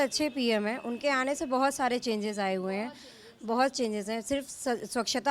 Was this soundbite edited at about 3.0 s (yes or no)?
no